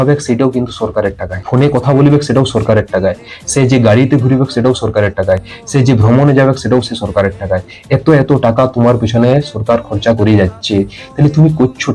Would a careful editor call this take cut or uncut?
cut